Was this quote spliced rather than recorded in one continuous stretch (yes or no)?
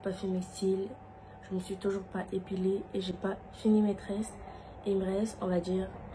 no